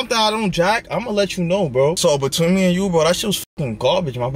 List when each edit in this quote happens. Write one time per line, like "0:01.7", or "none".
0:02.0

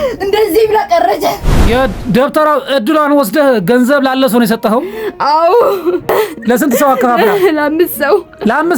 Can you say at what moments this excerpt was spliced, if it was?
0:01.6
0:06.1

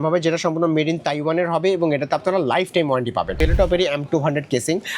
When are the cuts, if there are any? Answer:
0:03.4

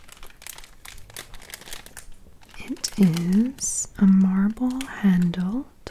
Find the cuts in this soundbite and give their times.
0:02.4

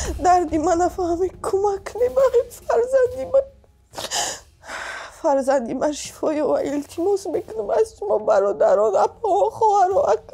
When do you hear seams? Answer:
none

